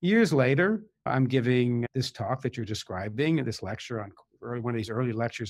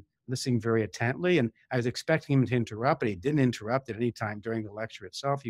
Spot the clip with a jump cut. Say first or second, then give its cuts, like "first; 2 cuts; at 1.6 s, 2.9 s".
first; 2 cuts; at 1.0 s, 1.9 s